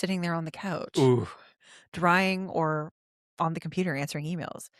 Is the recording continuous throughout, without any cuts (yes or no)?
yes